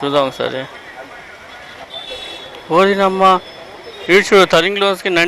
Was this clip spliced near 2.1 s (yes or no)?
yes